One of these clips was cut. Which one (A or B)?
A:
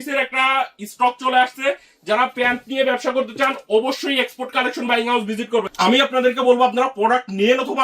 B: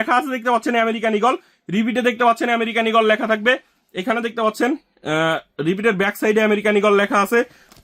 A